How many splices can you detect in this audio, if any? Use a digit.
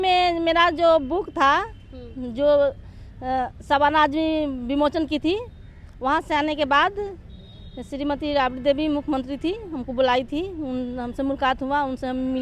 0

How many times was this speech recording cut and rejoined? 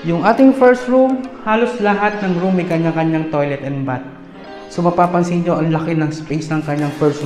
0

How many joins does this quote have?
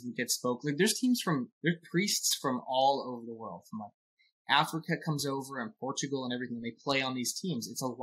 0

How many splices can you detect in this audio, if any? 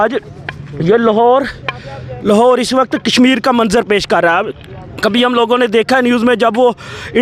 0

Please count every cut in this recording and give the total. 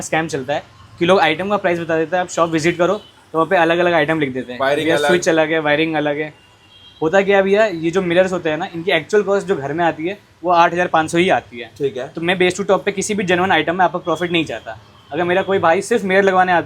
0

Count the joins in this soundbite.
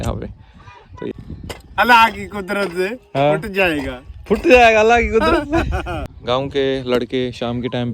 2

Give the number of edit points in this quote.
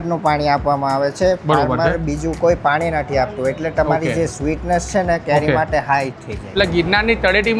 1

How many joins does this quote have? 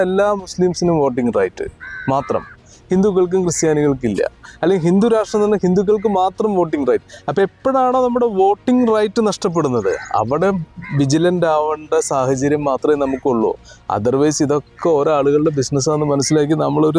0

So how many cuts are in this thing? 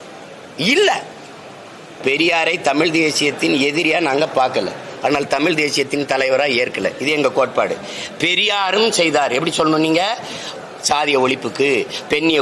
1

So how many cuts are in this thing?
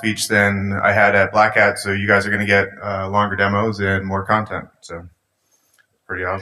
1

